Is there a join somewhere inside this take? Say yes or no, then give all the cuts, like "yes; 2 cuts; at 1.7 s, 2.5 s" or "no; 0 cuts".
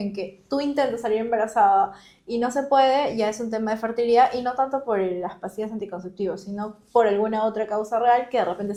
no; 0 cuts